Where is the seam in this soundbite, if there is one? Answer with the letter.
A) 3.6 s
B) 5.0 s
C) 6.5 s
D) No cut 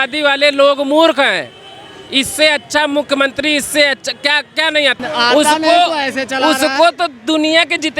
B